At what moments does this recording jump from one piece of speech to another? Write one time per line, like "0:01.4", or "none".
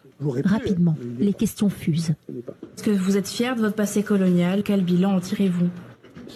none